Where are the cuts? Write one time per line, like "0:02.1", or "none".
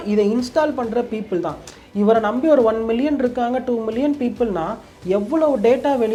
none

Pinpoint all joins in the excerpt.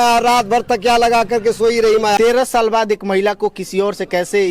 0:02.2

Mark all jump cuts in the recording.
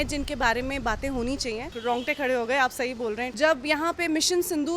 0:01.7
0:03.3

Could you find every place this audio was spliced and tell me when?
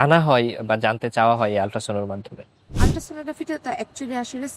0:02.8

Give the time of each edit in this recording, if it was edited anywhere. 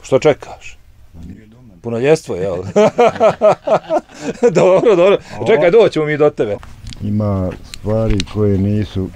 0:06.6

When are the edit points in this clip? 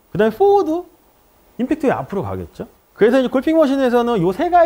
none

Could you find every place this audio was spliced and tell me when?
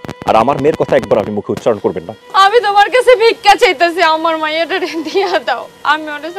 0:02.1

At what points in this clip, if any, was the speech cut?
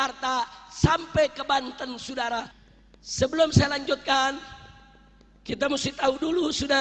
0:02.6

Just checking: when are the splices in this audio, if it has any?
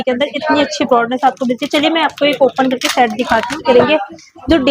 0:03.6

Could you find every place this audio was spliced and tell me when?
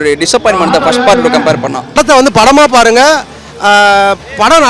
0:02.0

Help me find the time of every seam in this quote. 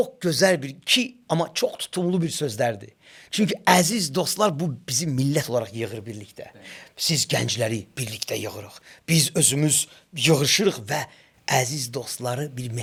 none

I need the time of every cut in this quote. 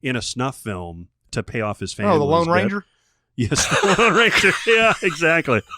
0:01.3

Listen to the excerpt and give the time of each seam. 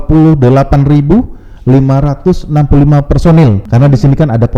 0:03.6

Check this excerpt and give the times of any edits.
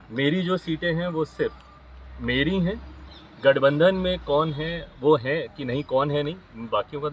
none

